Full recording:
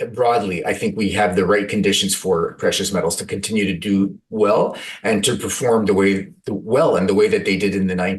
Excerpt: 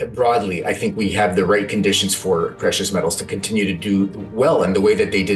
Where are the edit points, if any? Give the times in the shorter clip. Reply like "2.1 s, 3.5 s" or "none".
4.2 s